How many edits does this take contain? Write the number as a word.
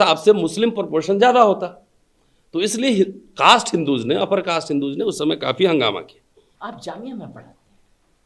one